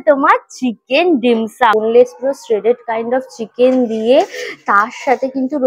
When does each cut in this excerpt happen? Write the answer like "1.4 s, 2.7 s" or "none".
1.7 s